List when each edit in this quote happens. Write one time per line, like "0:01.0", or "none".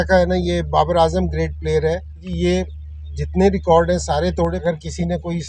0:02.3
0:04.6